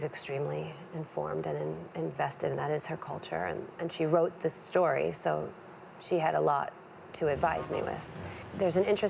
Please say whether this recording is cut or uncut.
cut